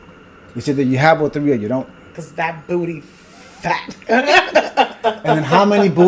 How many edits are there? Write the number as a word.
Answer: one